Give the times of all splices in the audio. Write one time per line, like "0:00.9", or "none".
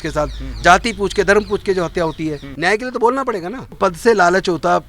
0:02.5
0:03.8